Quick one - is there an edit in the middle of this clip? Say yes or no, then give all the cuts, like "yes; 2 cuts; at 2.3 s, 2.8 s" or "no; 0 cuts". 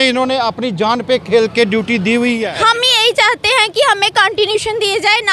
yes; 1 cut; at 2.4 s